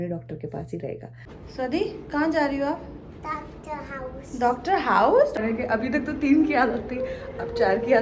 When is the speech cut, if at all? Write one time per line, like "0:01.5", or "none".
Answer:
0:01.4
0:05.4